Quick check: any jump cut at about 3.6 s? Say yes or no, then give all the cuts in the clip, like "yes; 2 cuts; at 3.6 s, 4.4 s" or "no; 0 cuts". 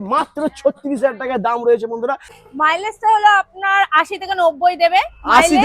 no; 1 cut; at 2.3 s